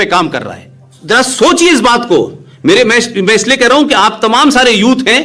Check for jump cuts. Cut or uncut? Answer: cut